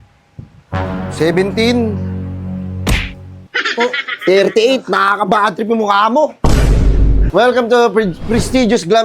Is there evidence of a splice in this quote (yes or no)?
yes